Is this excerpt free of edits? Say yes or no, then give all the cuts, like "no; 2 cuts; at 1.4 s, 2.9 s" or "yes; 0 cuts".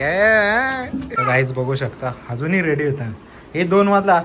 no; 1 cut; at 1.1 s